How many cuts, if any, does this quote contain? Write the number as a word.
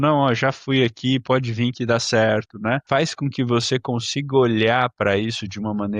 one